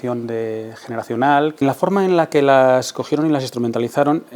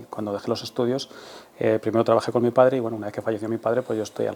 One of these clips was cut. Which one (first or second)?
first